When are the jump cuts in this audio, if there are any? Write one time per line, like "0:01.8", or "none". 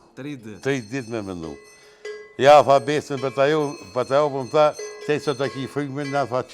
none